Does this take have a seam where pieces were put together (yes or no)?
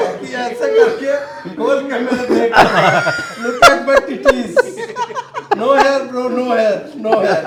no